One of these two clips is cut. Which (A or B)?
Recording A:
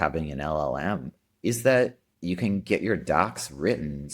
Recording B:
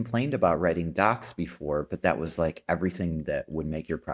A